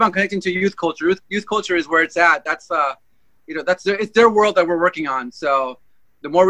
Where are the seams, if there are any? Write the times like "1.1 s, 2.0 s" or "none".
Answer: none